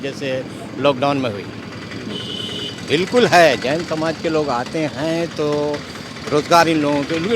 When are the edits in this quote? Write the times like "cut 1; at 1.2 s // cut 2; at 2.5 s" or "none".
none